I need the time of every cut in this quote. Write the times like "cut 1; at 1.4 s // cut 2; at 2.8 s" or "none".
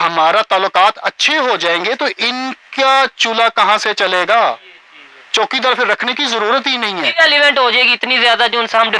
none